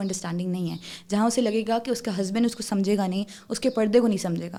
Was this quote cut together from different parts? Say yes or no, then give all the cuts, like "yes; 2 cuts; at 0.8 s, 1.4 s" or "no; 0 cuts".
no; 0 cuts